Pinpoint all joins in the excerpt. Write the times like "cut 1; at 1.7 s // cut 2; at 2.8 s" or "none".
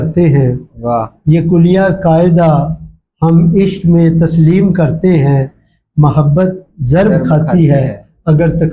none